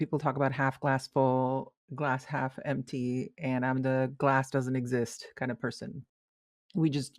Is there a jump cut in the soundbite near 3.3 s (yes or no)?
no